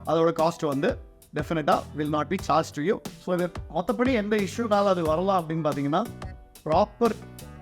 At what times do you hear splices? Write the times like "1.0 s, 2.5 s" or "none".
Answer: 3.1 s